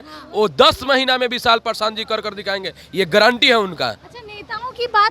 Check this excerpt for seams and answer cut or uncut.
uncut